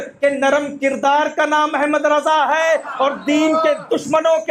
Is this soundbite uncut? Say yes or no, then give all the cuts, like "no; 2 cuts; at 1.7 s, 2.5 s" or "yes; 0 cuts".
yes; 0 cuts